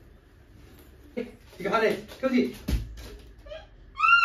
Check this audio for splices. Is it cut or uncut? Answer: cut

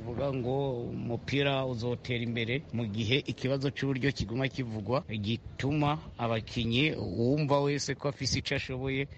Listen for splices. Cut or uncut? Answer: cut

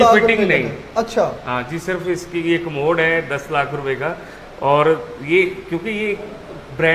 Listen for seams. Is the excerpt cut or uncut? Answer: uncut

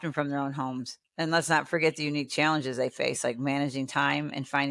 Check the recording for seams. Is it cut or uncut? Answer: uncut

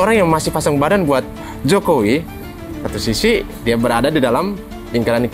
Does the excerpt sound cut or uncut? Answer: uncut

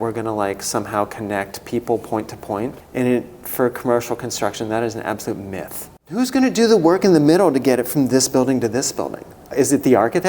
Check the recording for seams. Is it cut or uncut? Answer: cut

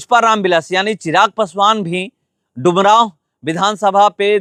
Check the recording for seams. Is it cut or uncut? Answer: uncut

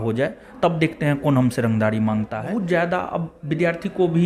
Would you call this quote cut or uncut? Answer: cut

